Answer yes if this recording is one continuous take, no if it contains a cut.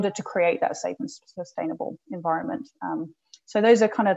yes